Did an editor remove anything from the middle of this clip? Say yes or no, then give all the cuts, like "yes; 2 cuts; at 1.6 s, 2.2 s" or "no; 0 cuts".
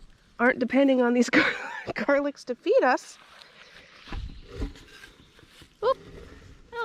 no; 0 cuts